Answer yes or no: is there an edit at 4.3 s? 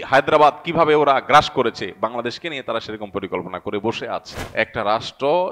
yes